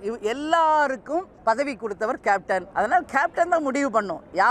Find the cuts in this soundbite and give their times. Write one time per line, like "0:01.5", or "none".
0:01.3
0:02.7